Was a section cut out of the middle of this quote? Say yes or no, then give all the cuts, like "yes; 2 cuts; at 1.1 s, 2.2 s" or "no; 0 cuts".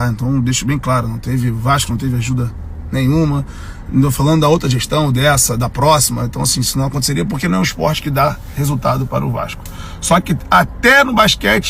no; 0 cuts